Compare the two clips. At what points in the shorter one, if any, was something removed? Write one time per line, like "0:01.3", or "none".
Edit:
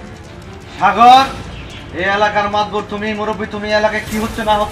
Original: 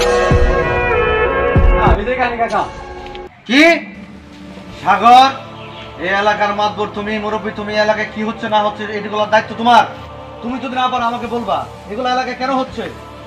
none